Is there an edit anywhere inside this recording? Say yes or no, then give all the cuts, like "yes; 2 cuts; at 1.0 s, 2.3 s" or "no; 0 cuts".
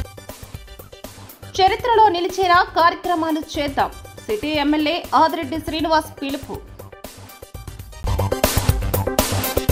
yes; 1 cut; at 1.2 s